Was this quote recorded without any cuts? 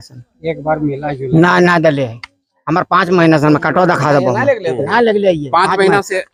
yes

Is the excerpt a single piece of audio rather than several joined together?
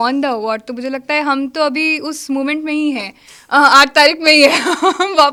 yes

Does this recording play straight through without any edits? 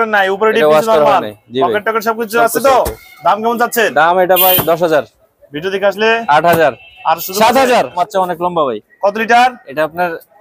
no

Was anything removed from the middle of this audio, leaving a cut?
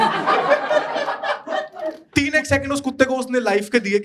yes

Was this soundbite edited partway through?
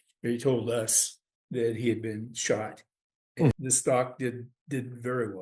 yes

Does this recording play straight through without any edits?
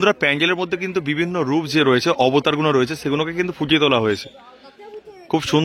yes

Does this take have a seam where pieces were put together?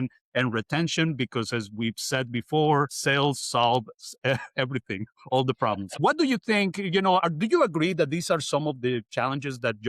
yes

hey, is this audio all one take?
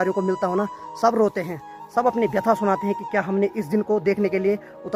yes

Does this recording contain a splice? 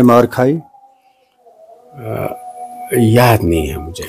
no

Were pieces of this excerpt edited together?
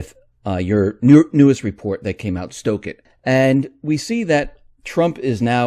no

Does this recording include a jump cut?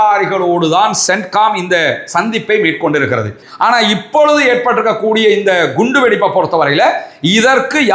yes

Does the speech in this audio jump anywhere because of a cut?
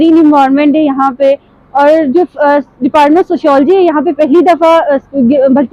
no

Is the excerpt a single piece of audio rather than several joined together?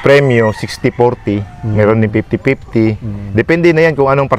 yes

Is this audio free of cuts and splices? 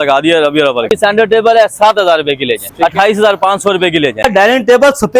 no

